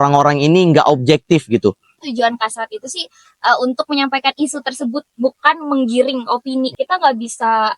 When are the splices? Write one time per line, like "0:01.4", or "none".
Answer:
0:02.0
0:06.7